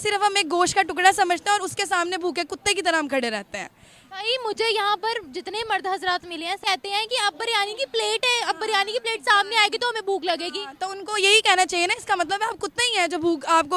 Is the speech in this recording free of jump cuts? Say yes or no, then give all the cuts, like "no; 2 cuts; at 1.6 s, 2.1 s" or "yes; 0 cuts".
yes; 0 cuts